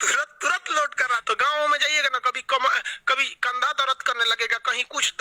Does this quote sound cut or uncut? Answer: cut